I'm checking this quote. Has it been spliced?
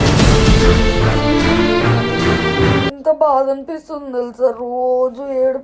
yes; 1 cut; at 3.0 s

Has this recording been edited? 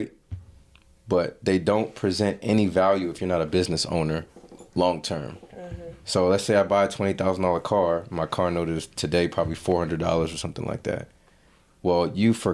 no; 0 cuts

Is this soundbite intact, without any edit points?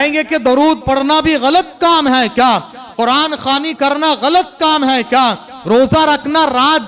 yes; 0 cuts

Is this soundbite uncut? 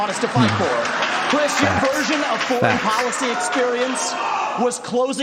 yes; 0 cuts

